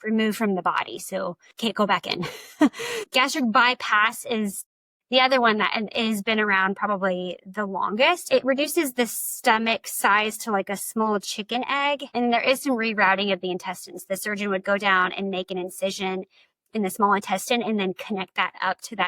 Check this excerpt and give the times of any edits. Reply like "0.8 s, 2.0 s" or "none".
3.0 s, 8.3 s, 12.1 s